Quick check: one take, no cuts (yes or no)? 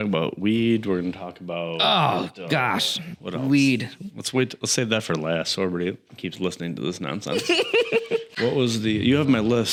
yes